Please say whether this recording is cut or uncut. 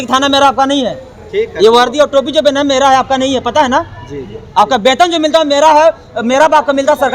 uncut